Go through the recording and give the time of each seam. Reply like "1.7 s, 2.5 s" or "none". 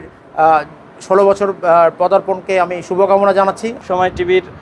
3.7 s